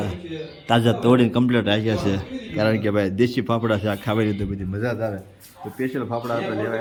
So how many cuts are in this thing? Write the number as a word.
zero